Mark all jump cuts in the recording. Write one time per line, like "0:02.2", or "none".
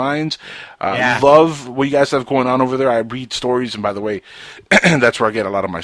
0:03.3